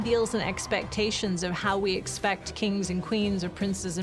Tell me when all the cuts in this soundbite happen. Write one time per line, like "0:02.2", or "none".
none